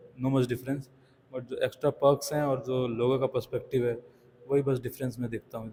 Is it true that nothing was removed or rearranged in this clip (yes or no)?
yes